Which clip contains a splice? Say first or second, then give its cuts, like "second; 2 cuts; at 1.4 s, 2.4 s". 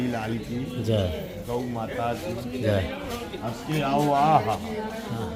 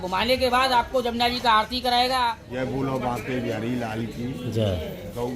second; 1 cut; at 2.4 s